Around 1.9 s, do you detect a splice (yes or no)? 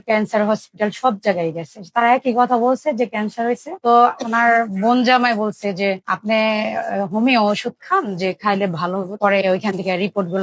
no